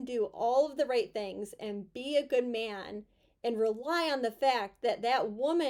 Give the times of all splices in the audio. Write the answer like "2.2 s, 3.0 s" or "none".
none